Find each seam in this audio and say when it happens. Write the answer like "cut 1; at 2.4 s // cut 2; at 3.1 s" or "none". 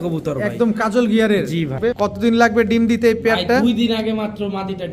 cut 1; at 1.8 s

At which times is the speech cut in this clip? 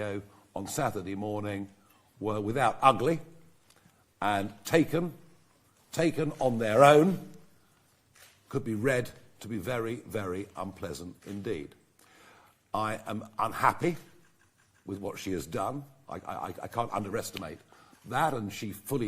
none

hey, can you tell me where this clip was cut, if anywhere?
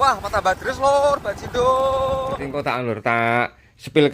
cut 1; at 2.5 s

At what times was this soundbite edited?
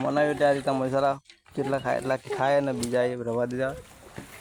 none

